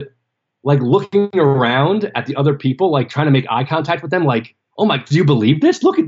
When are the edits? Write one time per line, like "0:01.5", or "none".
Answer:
0:01.6